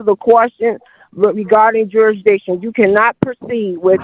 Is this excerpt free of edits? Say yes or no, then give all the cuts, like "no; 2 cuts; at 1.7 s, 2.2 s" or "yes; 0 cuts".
yes; 0 cuts